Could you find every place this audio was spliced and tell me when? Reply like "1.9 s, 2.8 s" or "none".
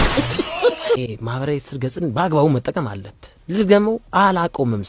0.9 s

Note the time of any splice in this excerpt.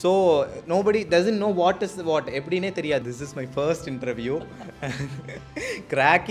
3.0 s

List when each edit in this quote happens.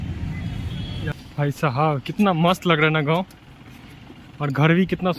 1.2 s

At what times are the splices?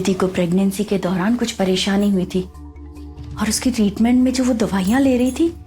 1.5 s

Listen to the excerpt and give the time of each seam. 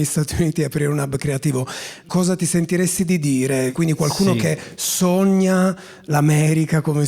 2.1 s, 3.7 s

